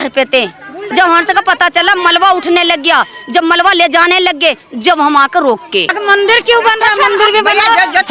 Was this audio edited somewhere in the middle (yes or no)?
yes